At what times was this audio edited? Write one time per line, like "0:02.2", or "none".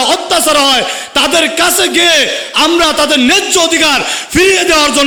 none